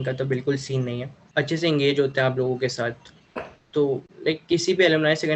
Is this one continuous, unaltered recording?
no; 1 cut; at 1.2 s

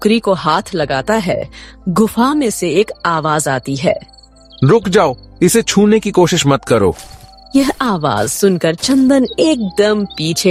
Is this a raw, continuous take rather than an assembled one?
yes; 0 cuts

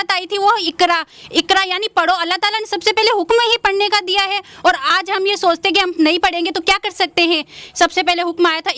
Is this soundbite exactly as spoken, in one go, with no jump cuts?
yes; 0 cuts

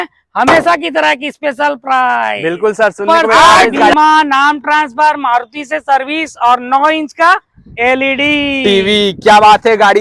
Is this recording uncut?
no; 1 cut; at 3.9 s

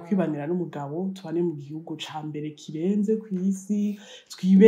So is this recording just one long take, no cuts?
yes; 0 cuts

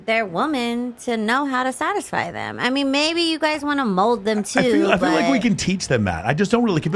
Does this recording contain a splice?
no; 0 cuts

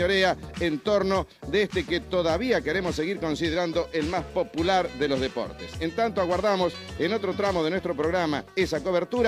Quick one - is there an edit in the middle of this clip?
no; 0 cuts

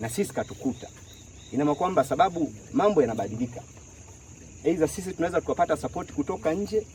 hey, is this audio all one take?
yes; 0 cuts

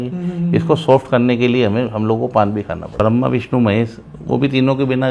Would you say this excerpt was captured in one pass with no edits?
no; 1 cut; at 2.8 s

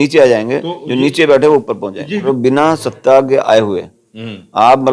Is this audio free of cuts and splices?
no; 1 cut; at 2.2 s

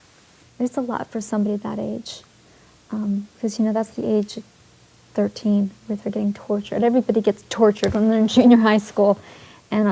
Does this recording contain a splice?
yes; 1 cut; at 1.0 s

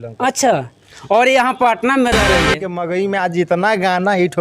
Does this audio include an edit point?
yes; 1 cut; at 2.7 s

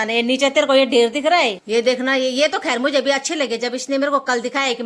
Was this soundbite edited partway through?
yes; 1 cut; at 1.6 s

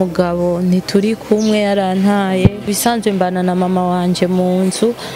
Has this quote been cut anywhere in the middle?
yes; 1 cut; at 2.7 s

